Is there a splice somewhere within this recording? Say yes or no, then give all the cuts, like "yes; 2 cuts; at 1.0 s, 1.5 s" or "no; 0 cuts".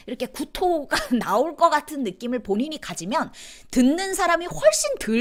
no; 0 cuts